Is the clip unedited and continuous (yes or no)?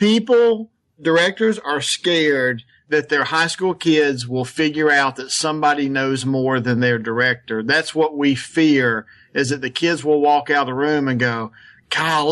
no